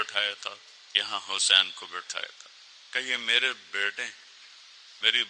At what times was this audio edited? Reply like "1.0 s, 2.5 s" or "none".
none